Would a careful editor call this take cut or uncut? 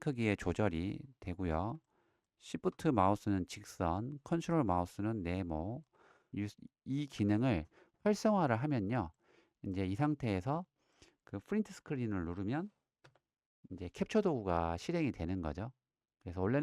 cut